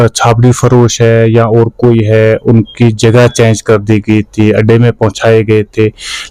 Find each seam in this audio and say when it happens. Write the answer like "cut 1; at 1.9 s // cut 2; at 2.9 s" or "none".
none